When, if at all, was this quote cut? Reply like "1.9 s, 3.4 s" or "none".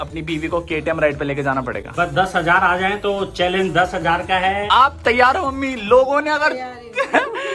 none

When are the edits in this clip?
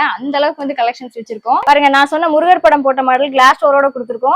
1.6 s

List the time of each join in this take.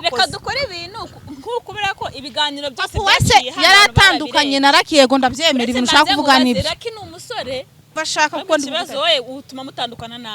7.9 s

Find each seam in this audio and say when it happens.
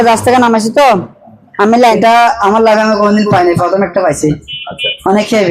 2.0 s

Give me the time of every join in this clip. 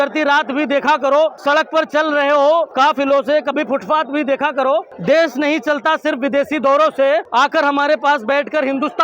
1.4 s, 2.7 s, 4.9 s, 7.3 s

